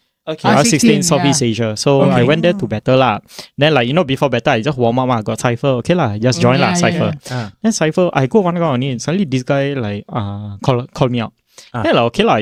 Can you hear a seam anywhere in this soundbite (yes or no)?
no